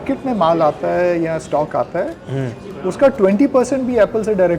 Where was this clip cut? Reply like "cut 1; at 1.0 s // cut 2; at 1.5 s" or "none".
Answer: none

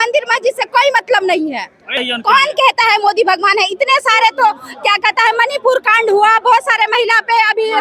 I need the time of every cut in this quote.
cut 1; at 2.0 s

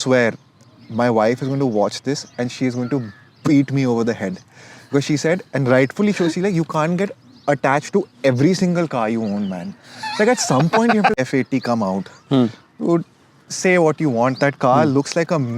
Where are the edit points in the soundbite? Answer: cut 1; at 11.2 s

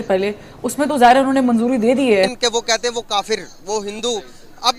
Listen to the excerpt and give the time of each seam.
cut 1; at 2.3 s

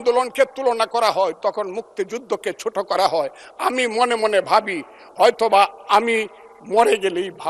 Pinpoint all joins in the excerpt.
none

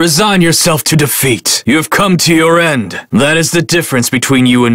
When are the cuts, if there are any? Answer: cut 1; at 3.0 s

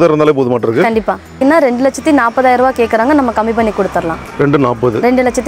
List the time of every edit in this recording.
cut 1; at 1.4 s // cut 2; at 4.2 s

